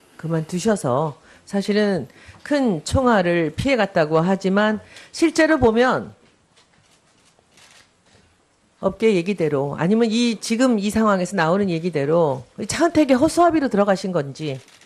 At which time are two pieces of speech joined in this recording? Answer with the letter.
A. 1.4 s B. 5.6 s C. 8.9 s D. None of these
A